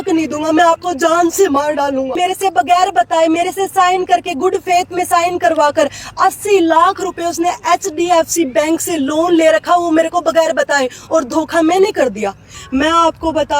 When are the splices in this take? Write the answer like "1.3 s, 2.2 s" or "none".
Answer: 2.2 s, 12.5 s